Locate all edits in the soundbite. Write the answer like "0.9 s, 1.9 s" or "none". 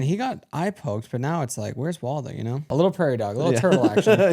2.7 s